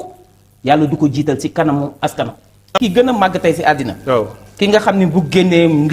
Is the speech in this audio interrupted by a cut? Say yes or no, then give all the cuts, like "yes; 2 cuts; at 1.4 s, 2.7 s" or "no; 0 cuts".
yes; 1 cut; at 2.7 s